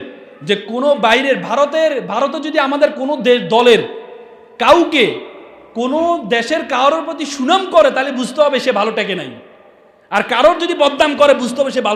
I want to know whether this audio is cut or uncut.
uncut